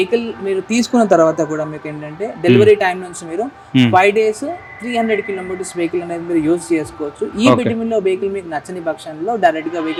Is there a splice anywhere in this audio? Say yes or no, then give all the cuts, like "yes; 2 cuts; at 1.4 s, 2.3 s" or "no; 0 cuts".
no; 0 cuts